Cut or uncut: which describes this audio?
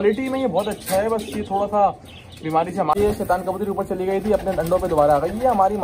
cut